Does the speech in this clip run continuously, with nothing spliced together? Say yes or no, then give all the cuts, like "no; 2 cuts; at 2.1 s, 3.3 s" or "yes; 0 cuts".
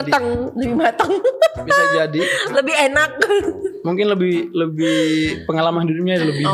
yes; 0 cuts